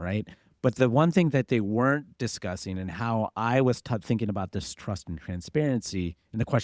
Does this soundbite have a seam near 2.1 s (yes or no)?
no